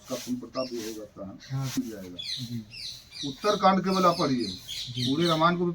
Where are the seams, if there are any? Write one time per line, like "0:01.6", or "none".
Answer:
0:01.8